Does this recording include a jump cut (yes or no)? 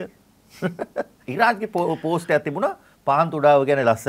yes